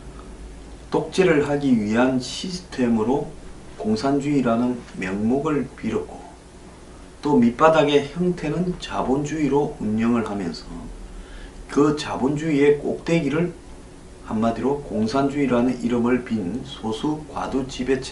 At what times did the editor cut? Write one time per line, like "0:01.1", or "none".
0:10.8

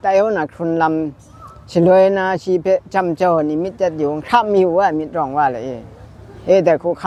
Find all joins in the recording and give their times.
none

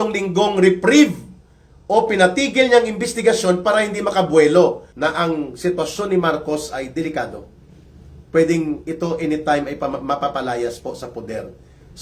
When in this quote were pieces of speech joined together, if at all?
0:04.9

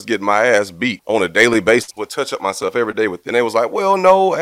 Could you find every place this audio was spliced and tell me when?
0:01.0
0:01.9
0:03.2

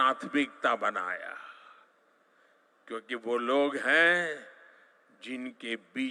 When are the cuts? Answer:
none

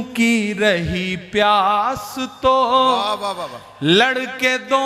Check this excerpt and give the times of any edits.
none

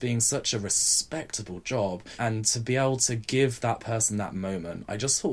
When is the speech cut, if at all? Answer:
0:02.1

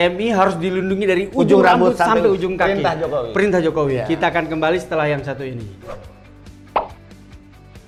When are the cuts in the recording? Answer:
none

